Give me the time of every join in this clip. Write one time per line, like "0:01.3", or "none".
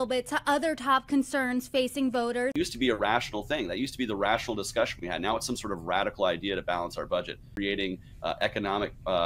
none